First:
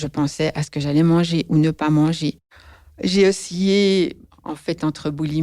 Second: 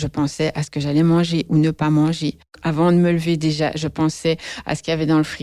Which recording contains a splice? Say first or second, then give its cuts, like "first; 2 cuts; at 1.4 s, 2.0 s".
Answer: second; 1 cut; at 2.5 s